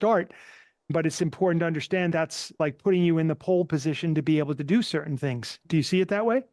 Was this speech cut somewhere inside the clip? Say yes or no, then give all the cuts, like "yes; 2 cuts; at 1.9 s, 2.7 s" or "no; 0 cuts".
yes; 3 cuts; at 0.9 s, 2.6 s, 5.6 s